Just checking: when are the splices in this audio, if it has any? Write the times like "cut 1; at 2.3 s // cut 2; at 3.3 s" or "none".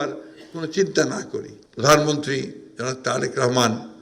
cut 1; at 1.6 s